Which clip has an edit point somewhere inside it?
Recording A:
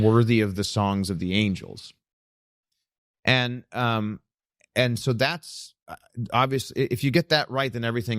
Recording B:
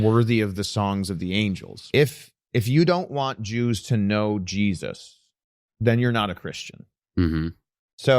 B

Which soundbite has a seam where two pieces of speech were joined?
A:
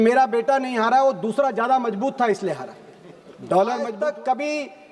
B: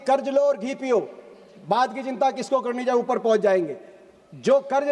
A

